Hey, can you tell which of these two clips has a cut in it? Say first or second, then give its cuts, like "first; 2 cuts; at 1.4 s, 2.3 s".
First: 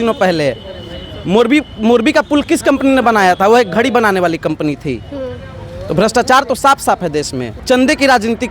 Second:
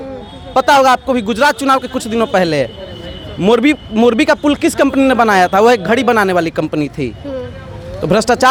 first; 1 cut; at 7.6 s